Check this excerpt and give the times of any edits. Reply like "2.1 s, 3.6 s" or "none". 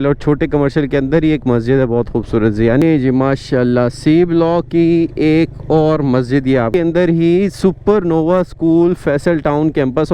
2.8 s, 6.7 s

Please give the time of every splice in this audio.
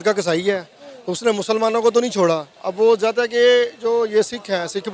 none

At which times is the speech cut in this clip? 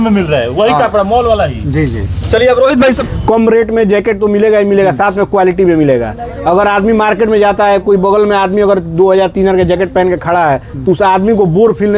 3.0 s

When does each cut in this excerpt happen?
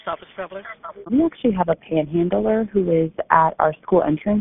1.1 s

